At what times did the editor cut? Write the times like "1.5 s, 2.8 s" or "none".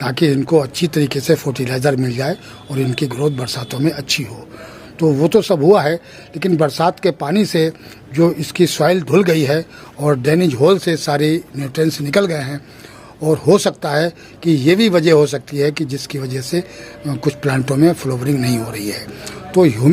none